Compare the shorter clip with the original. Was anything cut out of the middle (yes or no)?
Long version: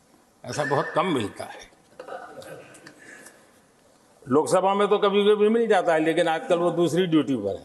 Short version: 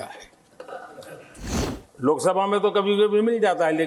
yes